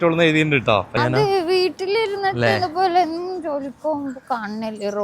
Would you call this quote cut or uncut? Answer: cut